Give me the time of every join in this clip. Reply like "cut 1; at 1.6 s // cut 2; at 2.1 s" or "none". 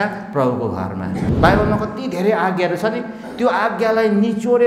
cut 1; at 1.3 s